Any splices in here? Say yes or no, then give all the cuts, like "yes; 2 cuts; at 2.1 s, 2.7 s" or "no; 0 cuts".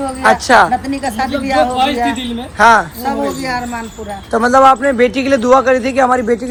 no; 0 cuts